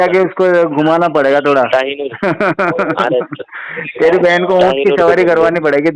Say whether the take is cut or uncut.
uncut